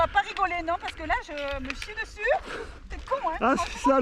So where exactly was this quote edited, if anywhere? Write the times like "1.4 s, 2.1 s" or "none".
none